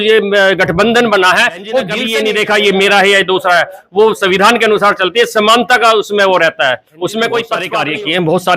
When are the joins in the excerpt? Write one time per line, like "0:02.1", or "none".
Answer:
0:02.0
0:07.7